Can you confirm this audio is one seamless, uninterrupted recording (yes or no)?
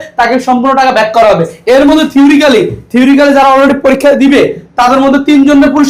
yes